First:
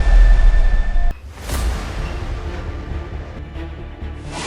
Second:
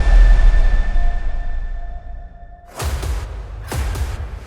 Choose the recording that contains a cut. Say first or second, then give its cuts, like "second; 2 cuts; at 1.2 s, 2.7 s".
first; 2 cuts; at 1.2 s, 3.4 s